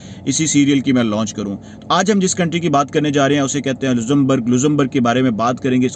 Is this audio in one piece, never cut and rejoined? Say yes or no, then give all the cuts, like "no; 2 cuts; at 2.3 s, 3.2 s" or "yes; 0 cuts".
yes; 0 cuts